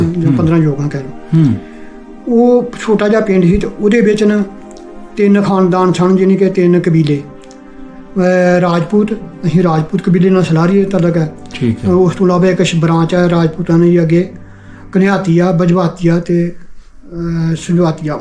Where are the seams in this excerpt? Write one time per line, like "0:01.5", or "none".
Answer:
none

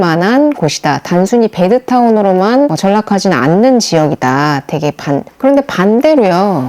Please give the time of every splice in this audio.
0:05.3

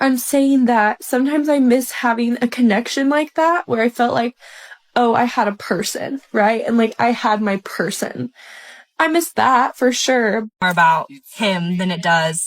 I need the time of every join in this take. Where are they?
0:10.6

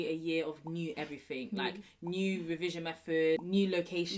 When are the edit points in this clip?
none

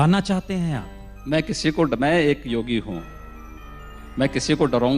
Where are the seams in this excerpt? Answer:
0:01.2

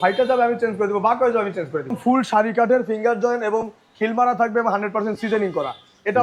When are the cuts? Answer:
0:02.0

